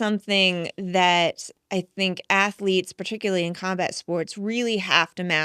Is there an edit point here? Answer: no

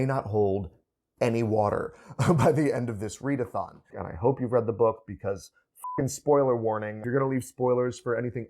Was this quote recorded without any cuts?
no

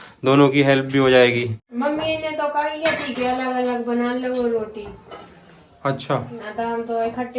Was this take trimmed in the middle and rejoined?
yes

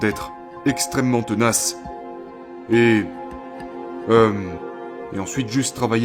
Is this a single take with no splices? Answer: yes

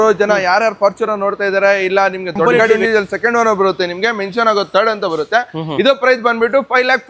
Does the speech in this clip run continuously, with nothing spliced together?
no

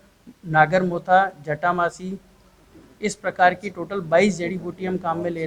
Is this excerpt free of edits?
yes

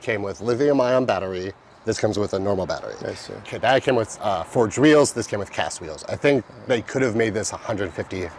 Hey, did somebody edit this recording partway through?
no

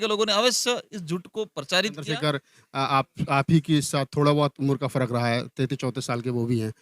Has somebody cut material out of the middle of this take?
yes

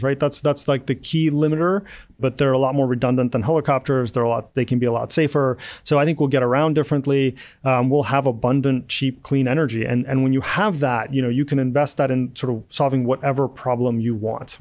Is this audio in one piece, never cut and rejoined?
no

